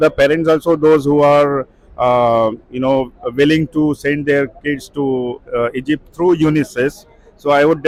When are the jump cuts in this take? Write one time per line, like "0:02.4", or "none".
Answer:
none